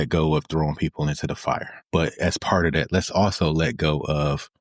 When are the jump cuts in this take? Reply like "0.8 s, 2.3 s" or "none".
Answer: 1.7 s